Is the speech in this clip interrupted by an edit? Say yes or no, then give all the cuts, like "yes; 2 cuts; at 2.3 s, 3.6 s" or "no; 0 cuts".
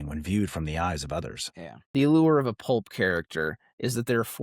yes; 1 cut; at 1.8 s